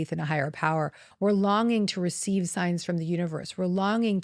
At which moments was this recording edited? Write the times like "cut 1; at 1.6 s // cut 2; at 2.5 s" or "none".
cut 1; at 1.0 s